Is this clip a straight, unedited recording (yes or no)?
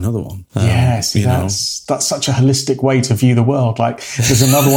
no